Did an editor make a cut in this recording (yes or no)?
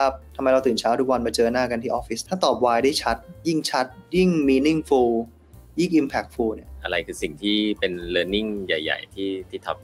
yes